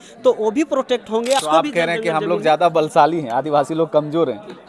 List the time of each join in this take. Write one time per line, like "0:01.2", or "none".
0:01.4